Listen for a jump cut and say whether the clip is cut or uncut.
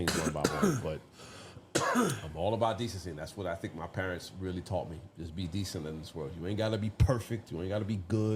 uncut